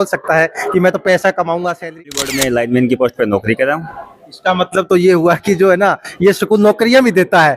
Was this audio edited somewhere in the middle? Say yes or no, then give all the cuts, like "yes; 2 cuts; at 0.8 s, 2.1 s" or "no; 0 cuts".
yes; 1 cut; at 2.1 s